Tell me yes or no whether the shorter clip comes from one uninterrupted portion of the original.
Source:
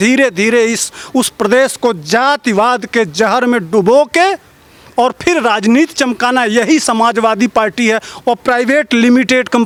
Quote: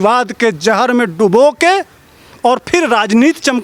yes